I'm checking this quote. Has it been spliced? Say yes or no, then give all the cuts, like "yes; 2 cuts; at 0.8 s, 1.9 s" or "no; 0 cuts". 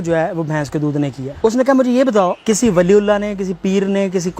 yes; 2 cuts; at 1.2 s, 2.4 s